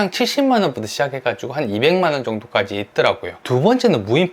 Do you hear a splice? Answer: yes; 1 cut; at 3.3 s

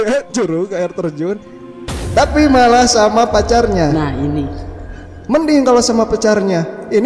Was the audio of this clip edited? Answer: no; 0 cuts

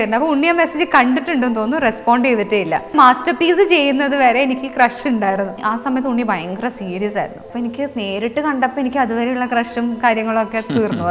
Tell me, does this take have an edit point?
yes; 3 cuts; at 2.9 s, 5.6 s, 7.4 s

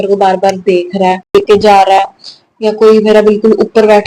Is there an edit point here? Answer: yes; 1 cut; at 1.3 s

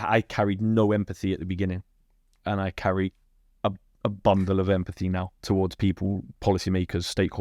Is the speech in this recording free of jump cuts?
yes; 0 cuts

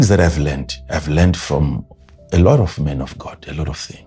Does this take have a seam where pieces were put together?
no; 0 cuts

